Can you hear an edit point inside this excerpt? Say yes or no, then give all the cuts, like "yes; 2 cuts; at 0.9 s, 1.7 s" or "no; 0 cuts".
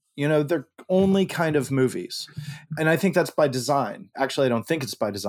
yes; 2 cuts; at 2.7 s, 4.1 s